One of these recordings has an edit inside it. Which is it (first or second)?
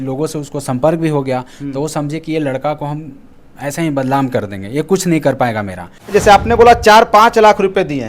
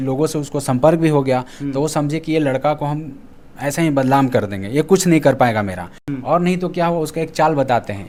first